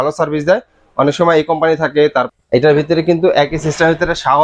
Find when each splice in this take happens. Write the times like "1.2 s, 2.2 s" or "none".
2.3 s